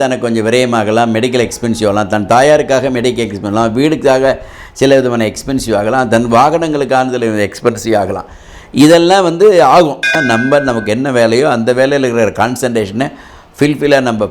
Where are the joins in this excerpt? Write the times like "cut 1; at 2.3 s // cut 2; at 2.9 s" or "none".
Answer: cut 1; at 10.1 s